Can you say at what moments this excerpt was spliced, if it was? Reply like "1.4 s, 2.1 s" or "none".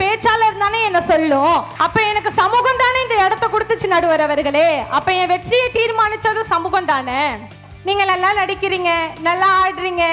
1.7 s, 7.7 s